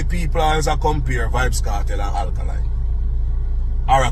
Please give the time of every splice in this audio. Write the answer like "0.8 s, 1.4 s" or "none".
none